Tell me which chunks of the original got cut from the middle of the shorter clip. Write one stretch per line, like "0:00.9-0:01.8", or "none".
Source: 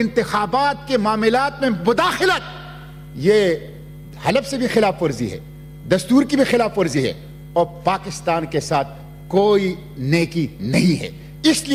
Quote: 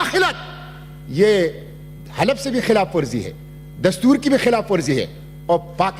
none